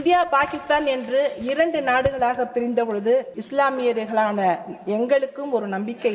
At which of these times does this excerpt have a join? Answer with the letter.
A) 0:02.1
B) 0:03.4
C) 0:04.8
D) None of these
B